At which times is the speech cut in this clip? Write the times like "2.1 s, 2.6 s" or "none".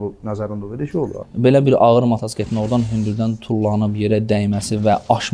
1.2 s